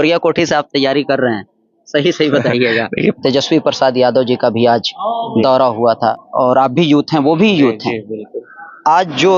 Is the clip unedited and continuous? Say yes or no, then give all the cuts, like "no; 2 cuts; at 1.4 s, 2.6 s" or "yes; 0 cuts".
no; 2 cuts; at 3.2 s, 6.2 s